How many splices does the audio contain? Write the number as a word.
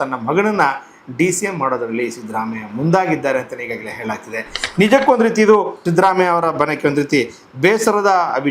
one